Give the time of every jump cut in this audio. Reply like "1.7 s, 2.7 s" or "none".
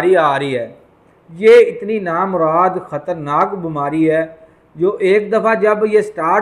none

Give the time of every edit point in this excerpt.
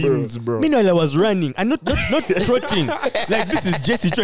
none

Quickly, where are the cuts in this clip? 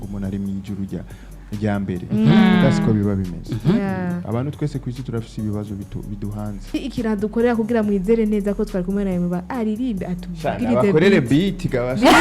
6.7 s

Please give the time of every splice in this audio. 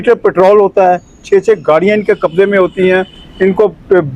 none

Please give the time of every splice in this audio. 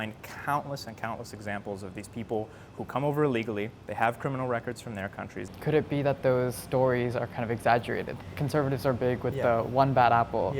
5.4 s, 8.1 s

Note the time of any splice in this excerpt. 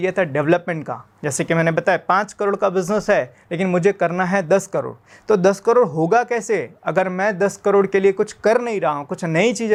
none

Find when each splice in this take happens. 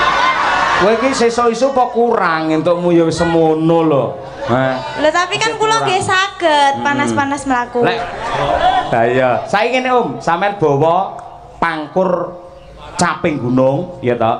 none

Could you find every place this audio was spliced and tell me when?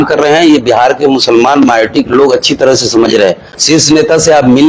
3.5 s

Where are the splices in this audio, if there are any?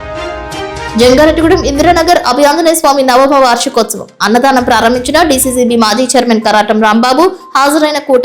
0.9 s

